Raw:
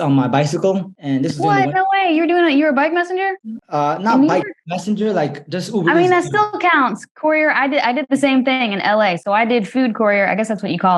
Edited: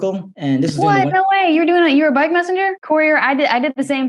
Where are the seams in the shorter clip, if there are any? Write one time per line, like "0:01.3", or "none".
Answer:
0:02.8